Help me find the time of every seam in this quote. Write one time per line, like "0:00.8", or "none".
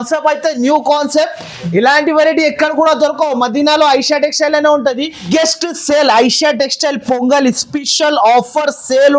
0:05.3